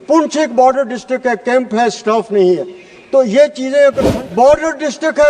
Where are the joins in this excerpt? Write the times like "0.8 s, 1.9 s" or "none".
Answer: 4.1 s